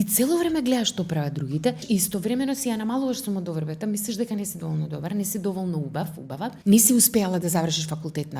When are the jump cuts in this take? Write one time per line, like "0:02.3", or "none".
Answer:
0:01.8
0:06.6